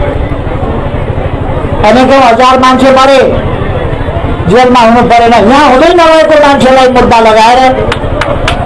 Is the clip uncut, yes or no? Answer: yes